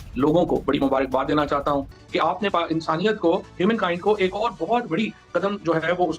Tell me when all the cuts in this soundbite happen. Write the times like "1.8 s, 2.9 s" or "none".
2.0 s